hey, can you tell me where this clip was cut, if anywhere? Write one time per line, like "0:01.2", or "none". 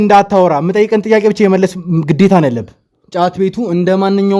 0:03.0